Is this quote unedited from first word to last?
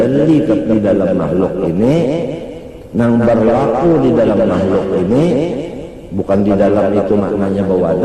yes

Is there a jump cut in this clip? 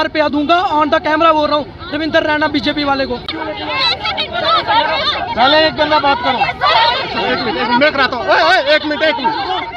yes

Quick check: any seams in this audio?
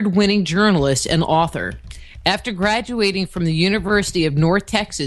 no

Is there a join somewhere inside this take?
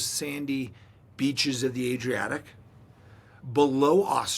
yes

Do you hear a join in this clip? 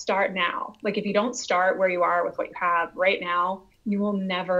no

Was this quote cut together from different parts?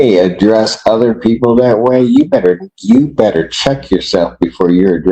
no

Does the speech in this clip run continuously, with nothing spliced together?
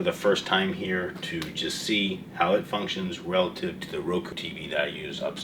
no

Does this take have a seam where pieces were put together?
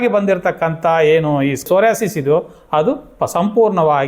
yes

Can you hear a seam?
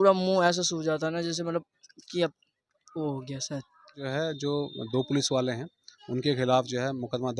yes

